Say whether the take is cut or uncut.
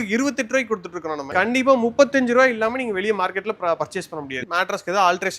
cut